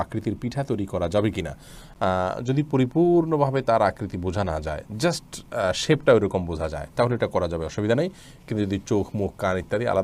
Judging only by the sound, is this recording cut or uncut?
uncut